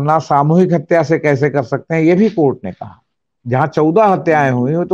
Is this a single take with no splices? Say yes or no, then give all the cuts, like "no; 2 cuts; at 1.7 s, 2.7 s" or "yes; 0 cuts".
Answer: yes; 0 cuts